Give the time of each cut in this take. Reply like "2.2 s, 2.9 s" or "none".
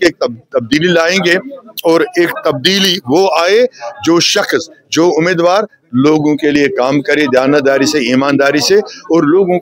none